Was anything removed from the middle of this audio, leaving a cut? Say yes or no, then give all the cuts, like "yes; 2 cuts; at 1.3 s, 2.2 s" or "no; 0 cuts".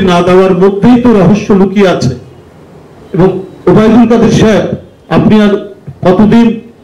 no; 0 cuts